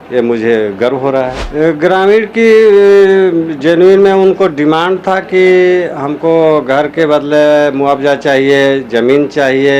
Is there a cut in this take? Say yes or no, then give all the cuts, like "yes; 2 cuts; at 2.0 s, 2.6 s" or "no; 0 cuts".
yes; 1 cut; at 1.4 s